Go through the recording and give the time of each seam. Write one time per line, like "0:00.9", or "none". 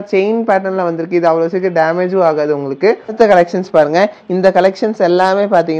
0:03.2